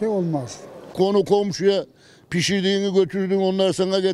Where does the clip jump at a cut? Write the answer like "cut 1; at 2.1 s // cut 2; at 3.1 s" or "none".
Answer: cut 1; at 0.9 s